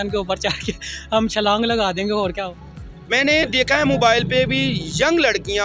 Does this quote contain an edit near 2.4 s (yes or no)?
yes